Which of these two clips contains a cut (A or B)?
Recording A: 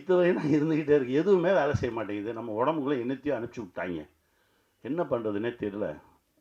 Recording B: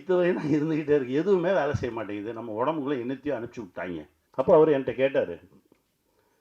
B